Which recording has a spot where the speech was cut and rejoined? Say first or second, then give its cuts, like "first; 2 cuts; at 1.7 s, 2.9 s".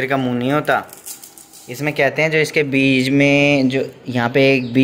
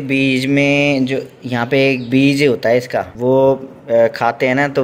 second; 1 cut; at 3.1 s